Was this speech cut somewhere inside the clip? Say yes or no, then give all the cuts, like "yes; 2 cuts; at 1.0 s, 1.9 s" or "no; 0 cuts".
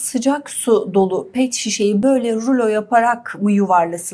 no; 0 cuts